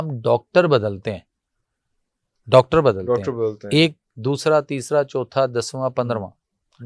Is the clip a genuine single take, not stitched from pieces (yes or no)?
yes